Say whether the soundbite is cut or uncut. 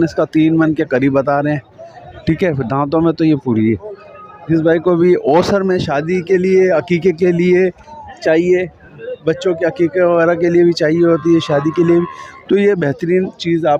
uncut